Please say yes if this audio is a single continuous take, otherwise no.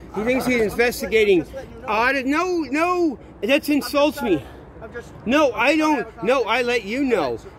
yes